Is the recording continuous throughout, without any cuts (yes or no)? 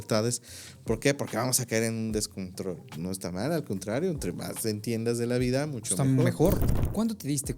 no